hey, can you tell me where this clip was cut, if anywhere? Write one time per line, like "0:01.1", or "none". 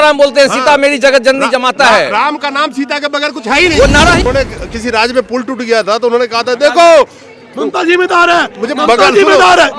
0:04.3